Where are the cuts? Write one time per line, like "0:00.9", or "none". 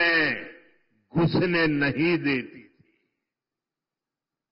none